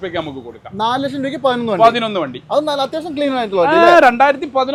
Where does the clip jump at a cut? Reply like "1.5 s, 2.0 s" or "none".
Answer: none